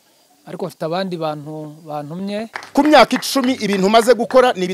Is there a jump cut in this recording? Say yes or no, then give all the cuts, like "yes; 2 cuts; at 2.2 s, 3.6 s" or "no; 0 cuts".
yes; 1 cut; at 2.6 s